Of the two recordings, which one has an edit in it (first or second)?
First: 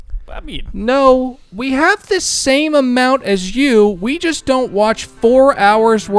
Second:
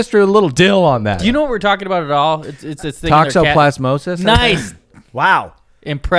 second